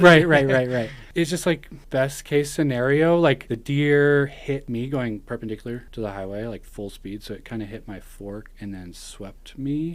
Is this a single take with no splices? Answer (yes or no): no